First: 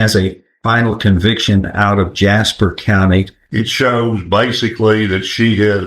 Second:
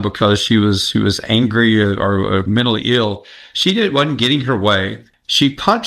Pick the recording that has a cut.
first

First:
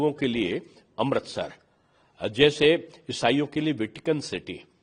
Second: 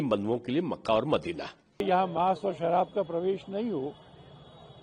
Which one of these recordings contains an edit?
second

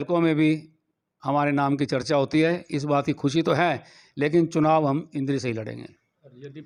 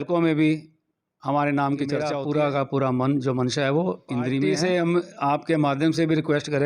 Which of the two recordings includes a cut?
second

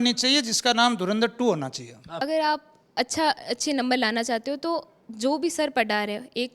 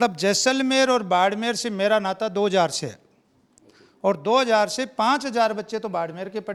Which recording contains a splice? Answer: first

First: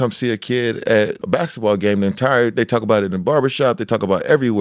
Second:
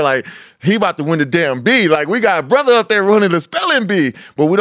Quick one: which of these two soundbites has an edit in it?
first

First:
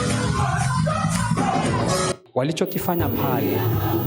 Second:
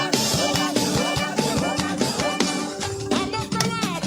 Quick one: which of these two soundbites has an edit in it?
first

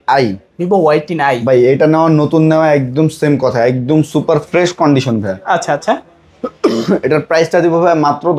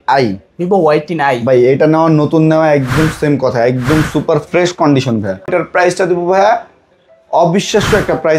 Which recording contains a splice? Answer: second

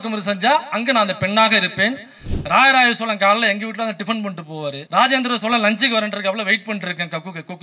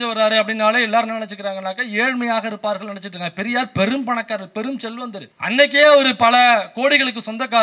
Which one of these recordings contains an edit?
first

